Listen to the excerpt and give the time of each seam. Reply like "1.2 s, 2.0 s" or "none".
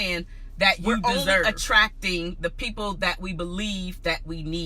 1.4 s